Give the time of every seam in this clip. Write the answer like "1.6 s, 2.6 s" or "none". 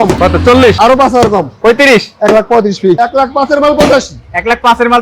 3.0 s